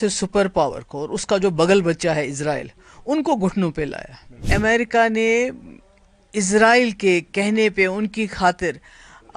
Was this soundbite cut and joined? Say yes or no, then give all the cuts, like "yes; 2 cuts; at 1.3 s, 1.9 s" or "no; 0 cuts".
yes; 1 cut; at 4.4 s